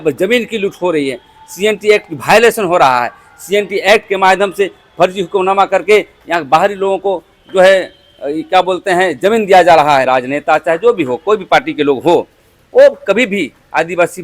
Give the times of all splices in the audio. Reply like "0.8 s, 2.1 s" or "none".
10.1 s